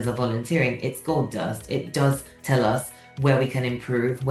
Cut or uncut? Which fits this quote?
uncut